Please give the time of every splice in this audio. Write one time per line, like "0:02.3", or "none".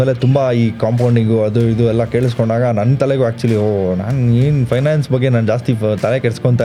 none